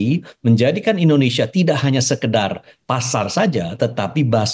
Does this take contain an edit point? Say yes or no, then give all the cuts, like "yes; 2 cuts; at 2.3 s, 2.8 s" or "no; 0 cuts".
no; 0 cuts